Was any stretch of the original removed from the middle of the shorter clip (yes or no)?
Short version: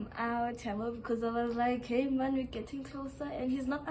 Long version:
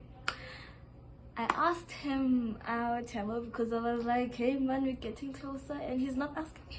no